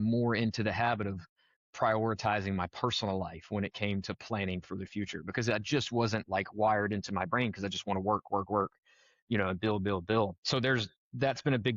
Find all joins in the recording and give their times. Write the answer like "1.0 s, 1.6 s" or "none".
10.4 s